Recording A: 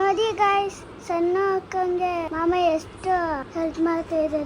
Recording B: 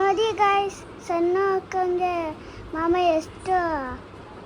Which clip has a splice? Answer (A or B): A